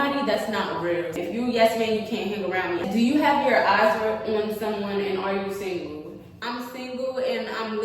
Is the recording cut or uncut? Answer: cut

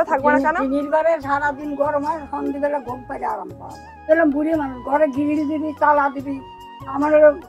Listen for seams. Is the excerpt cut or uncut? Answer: cut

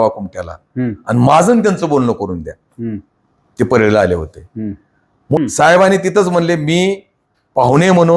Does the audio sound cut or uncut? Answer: cut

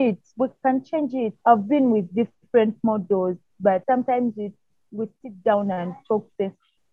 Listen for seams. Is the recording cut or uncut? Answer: cut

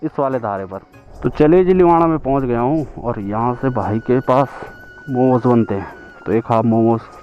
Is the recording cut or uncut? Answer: cut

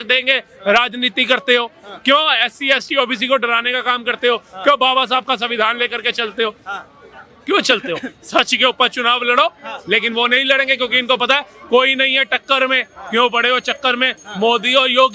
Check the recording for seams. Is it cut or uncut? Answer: uncut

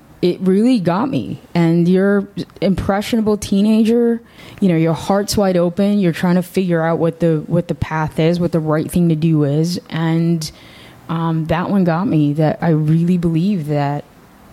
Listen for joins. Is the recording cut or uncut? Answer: uncut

